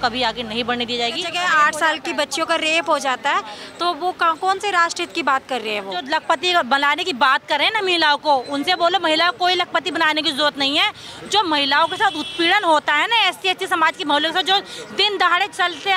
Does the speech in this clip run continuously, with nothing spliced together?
no; 2 cuts; at 1.3 s, 6.0 s

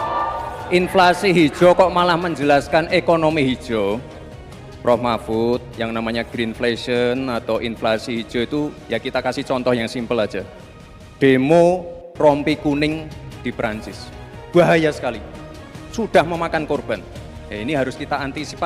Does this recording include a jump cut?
no; 0 cuts

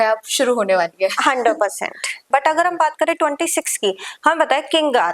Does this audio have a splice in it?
yes; 1 cut; at 2.3 s

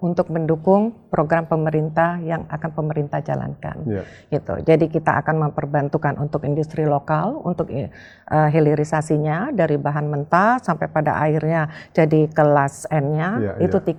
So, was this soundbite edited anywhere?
no; 0 cuts

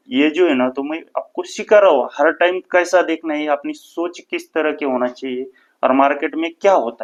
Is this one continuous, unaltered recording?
yes; 0 cuts

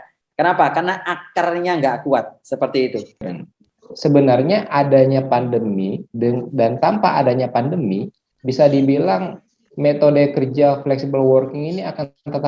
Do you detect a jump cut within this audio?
yes; 1 cut; at 3.3 s

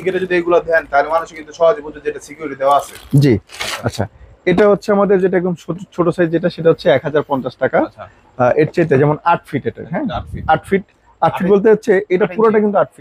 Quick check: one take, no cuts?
yes; 0 cuts

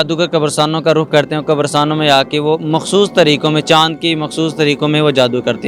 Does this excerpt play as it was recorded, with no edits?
yes; 0 cuts

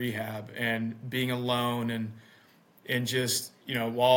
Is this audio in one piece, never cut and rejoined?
yes; 0 cuts

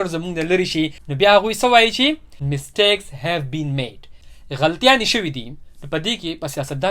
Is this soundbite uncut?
no; 2 cuts; at 2.3 s, 4.0 s

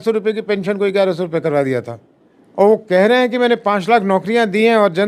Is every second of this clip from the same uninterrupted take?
yes; 0 cuts

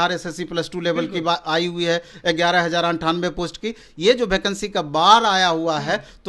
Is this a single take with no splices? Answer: yes; 0 cuts

